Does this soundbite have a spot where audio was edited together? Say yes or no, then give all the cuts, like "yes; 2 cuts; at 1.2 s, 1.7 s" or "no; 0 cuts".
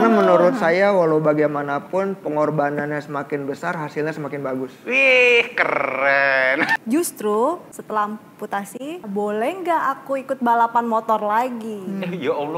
yes; 3 cuts; at 6.7 s, 7.7 s, 9.0 s